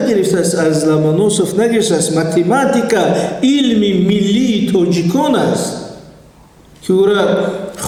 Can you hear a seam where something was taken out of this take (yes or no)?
no